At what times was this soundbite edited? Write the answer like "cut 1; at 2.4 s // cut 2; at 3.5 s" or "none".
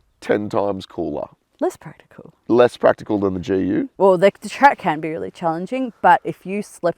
cut 1; at 3.9 s